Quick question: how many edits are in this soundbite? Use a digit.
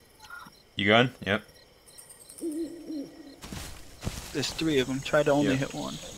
1